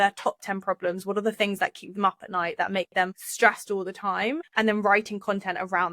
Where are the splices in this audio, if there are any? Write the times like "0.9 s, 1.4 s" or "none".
3.2 s, 4.4 s